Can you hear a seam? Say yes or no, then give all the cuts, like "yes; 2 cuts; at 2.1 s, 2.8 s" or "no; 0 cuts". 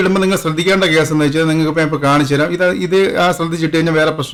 no; 0 cuts